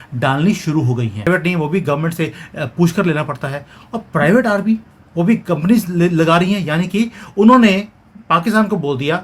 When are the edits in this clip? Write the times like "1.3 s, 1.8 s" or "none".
1.3 s